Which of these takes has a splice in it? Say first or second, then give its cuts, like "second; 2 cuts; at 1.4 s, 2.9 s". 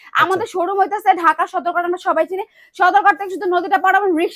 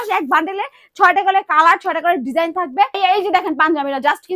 second; 1 cut; at 3.0 s